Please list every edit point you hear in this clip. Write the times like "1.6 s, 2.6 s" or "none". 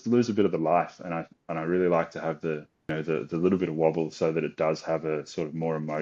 2.9 s